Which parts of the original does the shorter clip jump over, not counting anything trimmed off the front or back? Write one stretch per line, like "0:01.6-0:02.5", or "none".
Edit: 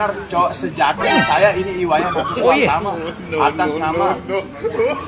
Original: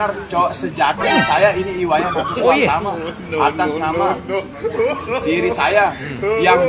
none